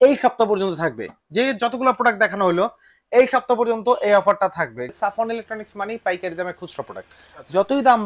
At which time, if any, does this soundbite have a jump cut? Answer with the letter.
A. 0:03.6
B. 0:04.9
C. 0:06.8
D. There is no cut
B